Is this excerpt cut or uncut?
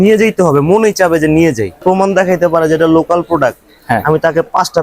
cut